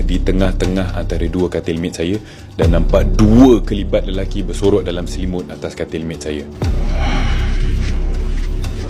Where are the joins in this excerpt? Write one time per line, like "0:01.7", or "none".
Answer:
none